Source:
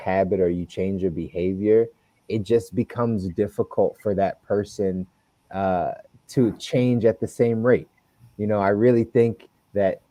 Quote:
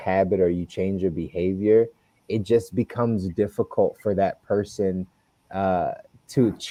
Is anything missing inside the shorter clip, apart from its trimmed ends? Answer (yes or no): no